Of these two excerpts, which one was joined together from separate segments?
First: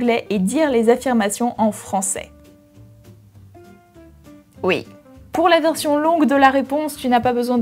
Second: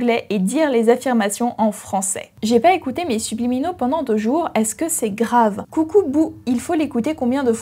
second; 2 cuts; at 2.2 s, 5.6 s

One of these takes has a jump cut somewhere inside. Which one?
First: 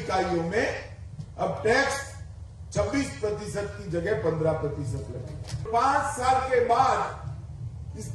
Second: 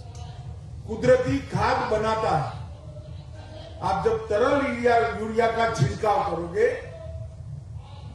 first; 1 cut; at 5.7 s

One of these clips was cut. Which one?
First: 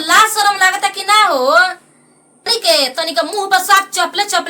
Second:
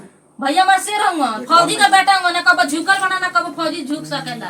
first; 1 cut; at 2.5 s

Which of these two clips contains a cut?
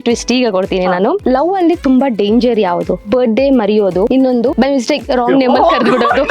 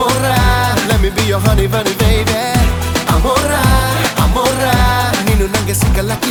first; 3 cuts; at 1.2 s, 3.0 s, 4.3 s

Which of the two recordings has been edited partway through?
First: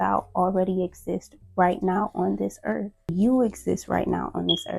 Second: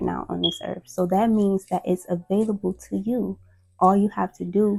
first; 1 cut; at 3.1 s

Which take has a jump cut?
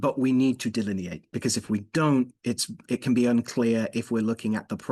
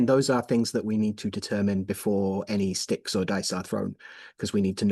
first; 1 cut; at 1.3 s

